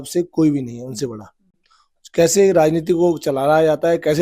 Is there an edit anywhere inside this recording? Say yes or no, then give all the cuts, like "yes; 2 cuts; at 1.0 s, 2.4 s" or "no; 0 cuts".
no; 0 cuts